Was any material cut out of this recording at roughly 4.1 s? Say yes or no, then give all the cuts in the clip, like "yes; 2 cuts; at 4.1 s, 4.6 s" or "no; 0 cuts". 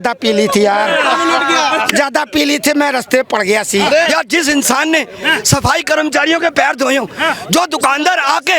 yes; 1 cut; at 4.1 s